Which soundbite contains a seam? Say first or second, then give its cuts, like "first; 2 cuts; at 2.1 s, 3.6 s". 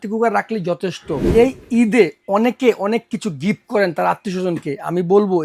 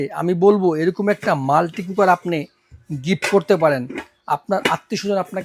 first; 1 cut; at 1.3 s